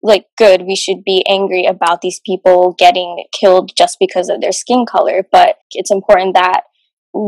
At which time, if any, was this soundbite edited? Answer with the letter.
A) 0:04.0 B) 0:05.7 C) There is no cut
B